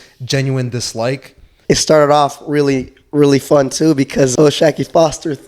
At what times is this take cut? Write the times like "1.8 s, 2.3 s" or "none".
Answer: 1.5 s, 4.3 s